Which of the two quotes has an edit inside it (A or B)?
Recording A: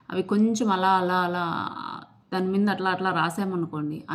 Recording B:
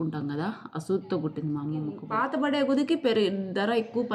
B